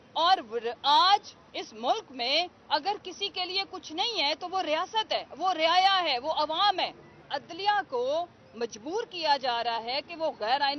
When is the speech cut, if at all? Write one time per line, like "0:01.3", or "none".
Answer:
0:07.3